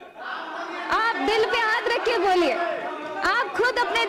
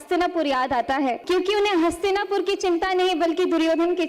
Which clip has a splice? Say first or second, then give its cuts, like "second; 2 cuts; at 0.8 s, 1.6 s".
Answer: second; 1 cut; at 1.2 s